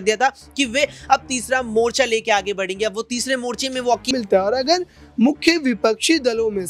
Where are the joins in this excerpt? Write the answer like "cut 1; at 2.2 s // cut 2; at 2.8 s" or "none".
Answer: cut 1; at 4.1 s